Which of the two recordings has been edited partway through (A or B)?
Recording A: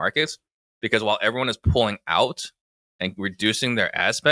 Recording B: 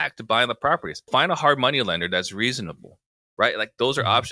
B